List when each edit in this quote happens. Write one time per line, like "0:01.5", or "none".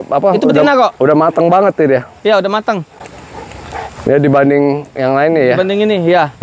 none